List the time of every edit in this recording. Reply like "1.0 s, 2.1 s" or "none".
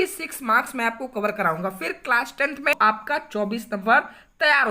2.8 s